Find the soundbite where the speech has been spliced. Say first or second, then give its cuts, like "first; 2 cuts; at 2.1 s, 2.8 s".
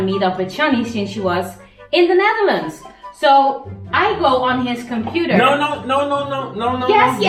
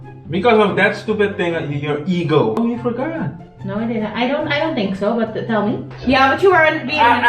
second; 2 cuts; at 2.6 s, 5.9 s